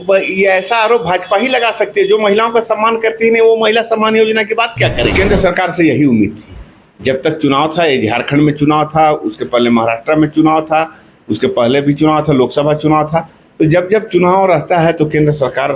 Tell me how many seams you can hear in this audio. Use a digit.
1